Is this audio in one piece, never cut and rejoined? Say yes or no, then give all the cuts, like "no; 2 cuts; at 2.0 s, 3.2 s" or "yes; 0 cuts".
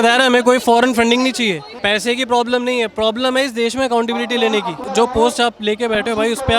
no; 2 cuts; at 1.7 s, 4.8 s